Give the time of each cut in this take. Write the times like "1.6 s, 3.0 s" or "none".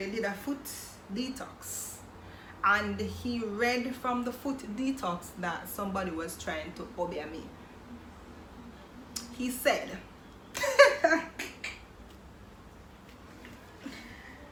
none